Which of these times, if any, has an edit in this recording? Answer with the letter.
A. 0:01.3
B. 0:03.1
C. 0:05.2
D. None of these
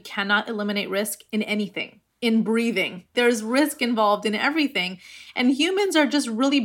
B